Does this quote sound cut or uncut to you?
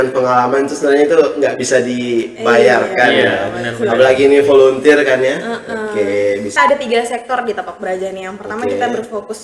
cut